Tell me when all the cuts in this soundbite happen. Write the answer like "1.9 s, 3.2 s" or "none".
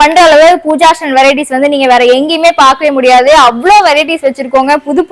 none